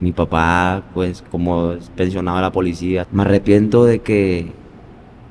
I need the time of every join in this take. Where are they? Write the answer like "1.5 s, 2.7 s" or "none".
3.1 s